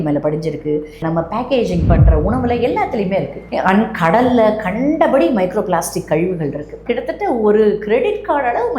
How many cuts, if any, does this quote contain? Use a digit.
2